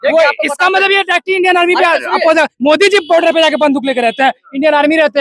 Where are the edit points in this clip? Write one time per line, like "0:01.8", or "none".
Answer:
none